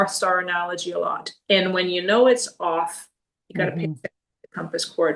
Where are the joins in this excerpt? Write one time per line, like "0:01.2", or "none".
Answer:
none

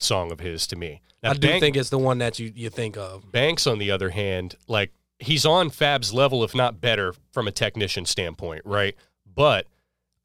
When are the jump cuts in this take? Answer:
0:01.0
0:05.1

